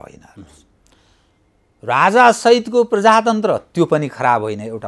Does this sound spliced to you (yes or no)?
no